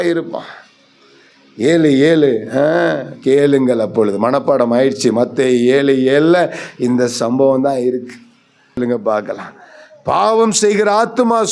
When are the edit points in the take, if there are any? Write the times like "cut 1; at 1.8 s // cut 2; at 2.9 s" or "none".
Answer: cut 1; at 8.8 s